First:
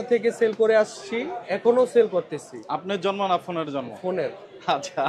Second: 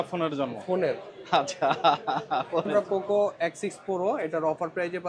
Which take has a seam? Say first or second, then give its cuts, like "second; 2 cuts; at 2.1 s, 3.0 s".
second; 1 cut; at 2.7 s